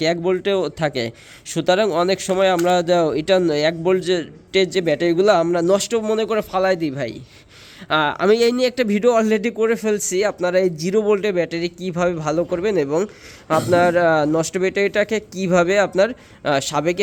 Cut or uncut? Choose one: uncut